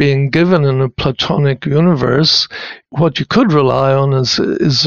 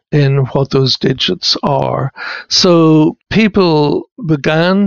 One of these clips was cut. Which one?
second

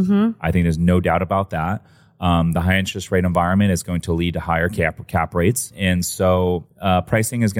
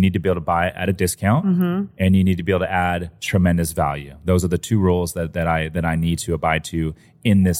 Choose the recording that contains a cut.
first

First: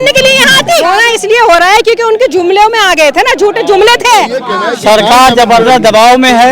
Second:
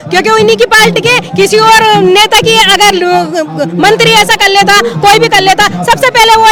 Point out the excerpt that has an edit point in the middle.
first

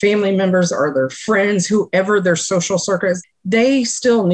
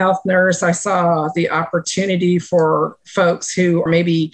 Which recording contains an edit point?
first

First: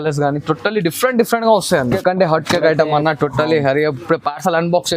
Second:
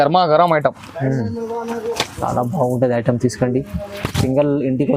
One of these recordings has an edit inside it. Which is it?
first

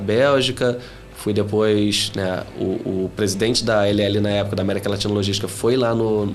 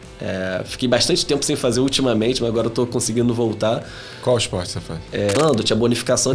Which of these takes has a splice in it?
second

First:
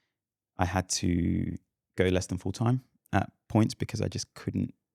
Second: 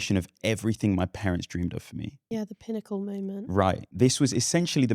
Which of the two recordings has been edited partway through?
second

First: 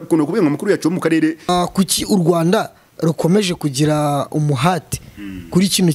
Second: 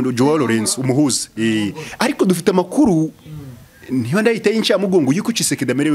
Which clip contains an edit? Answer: first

